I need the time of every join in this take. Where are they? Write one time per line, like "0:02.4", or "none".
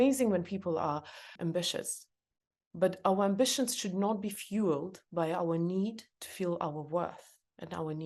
0:01.2